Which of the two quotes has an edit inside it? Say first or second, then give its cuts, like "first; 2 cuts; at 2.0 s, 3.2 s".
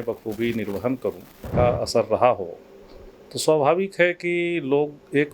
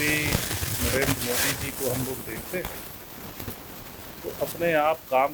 first; 1 cut; at 1.4 s